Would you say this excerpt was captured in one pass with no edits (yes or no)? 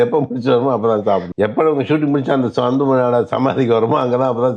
no